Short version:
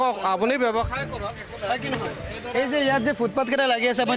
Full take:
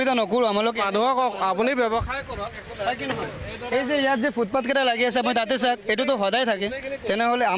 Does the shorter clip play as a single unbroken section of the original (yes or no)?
yes